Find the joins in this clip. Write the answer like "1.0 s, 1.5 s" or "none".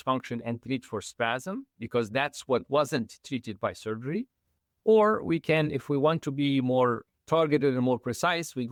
none